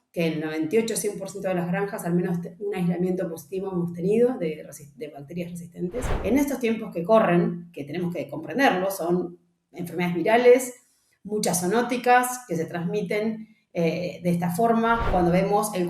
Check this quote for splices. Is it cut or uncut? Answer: cut